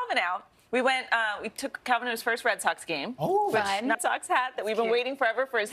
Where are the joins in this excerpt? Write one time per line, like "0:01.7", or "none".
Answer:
none